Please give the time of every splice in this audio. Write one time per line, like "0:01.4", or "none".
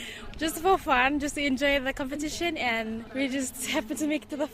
0:03.0